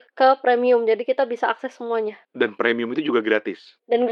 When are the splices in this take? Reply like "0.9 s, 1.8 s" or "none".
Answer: none